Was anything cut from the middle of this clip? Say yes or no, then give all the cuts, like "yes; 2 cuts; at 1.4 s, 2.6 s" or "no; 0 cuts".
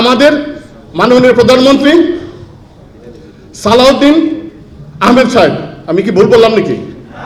no; 0 cuts